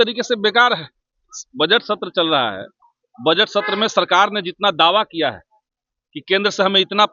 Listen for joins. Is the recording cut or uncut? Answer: uncut